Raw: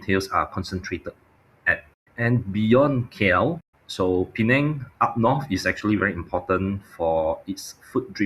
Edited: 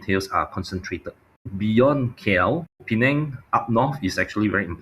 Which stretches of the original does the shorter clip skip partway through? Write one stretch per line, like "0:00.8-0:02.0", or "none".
0:01.5-0:02.5
0:03.8-0:04.3